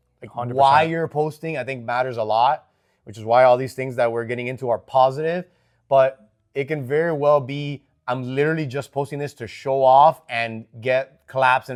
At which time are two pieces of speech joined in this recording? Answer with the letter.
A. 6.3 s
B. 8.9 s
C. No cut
C